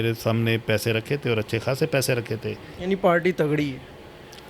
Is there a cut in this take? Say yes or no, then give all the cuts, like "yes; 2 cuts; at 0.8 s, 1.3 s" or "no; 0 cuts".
yes; 1 cut; at 2.7 s